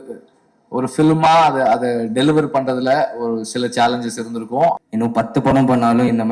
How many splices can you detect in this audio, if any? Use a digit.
1